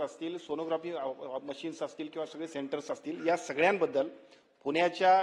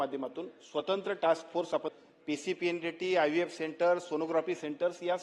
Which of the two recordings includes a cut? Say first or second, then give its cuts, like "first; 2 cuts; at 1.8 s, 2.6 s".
second; 1 cut; at 1.9 s